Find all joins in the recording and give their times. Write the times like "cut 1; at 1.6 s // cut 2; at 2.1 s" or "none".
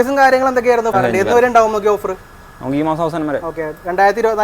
cut 1; at 0.9 s